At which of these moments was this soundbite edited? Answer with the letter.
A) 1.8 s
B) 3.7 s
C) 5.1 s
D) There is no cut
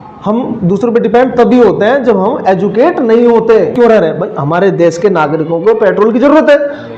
B